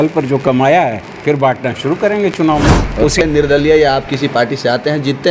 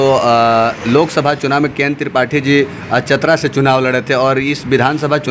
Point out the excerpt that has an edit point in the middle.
first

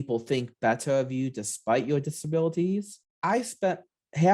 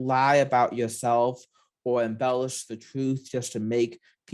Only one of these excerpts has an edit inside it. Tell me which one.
first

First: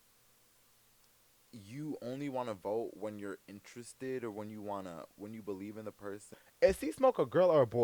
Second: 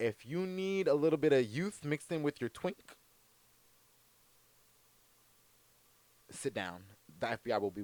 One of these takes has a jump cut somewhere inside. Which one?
first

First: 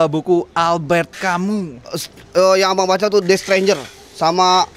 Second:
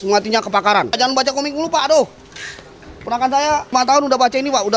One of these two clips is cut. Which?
second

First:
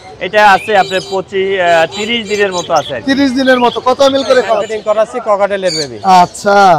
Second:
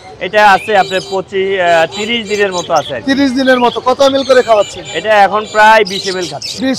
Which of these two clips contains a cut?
first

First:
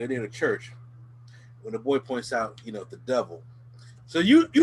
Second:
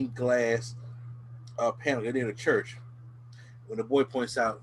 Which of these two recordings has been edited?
first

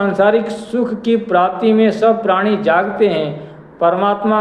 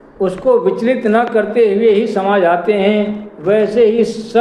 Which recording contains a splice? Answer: first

